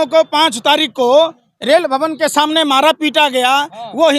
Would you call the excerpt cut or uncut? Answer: uncut